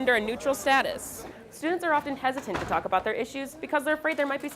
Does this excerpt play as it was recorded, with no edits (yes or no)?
no